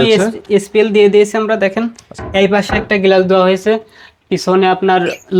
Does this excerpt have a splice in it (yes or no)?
no